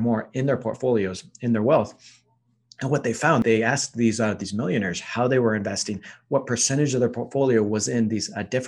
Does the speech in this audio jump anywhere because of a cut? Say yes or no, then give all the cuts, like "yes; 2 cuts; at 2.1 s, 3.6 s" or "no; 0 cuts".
no; 0 cuts